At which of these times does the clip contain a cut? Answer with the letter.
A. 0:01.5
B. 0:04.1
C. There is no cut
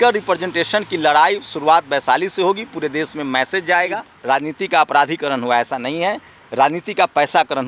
B